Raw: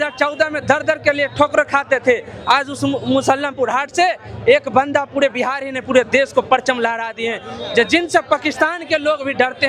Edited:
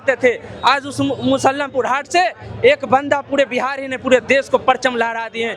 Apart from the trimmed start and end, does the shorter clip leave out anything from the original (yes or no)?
no